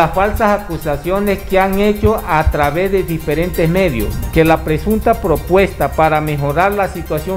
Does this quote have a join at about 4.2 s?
yes; 1 cut; at 4.2 s

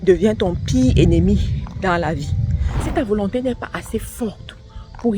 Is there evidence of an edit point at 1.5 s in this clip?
no; 1 cut; at 2.9 s

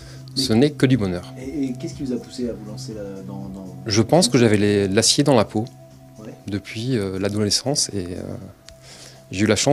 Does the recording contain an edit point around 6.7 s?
yes; 1 cut; at 6.7 s

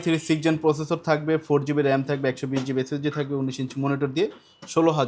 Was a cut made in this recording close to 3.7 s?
no; 0 cuts

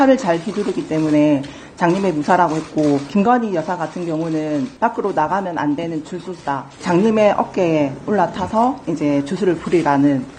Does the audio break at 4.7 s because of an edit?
yes; 4 cuts; at 3.1 s, 4.7 s, 6.8 s, 8.8 s

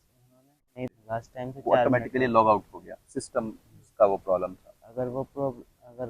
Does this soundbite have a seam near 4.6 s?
no; 1 cut; at 0.9 s

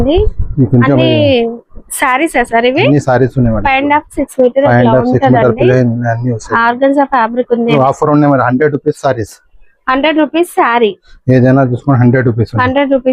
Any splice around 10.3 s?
no; 1 cut; at 7.7 s

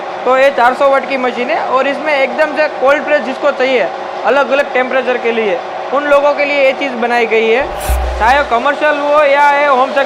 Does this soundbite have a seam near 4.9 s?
no; 1 cut; at 8.0 s

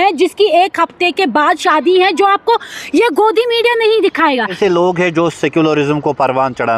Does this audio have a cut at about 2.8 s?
no; 1 cut; at 4.6 s

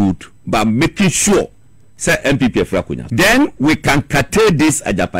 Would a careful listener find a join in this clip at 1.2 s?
no; 1 cut; at 3.0 s

